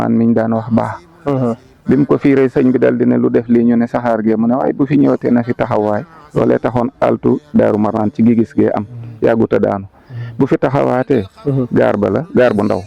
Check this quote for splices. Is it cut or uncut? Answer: uncut